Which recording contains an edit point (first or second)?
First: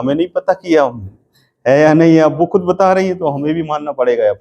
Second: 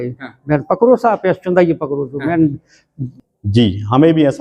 second